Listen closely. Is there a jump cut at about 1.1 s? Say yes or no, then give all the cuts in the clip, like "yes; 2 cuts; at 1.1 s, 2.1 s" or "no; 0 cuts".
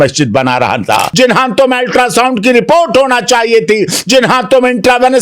yes; 1 cut; at 1.1 s